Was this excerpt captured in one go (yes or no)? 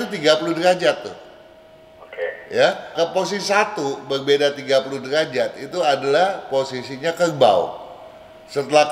no